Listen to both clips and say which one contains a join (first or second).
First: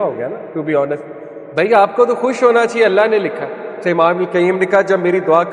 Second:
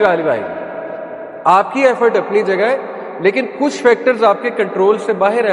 first